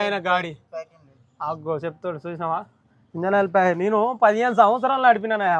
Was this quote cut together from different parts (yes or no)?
no